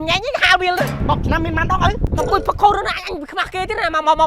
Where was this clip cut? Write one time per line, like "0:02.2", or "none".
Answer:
0:01.0
0:02.1